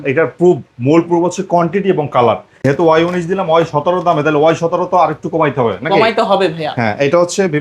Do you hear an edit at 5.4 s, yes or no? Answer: no